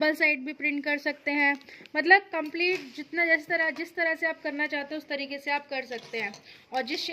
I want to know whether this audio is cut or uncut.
uncut